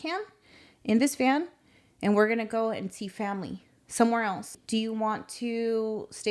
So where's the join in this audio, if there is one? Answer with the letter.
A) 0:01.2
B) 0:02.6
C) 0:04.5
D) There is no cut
C